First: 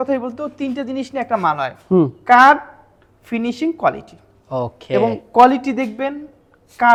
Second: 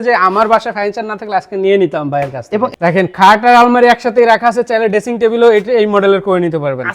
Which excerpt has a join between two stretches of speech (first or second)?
second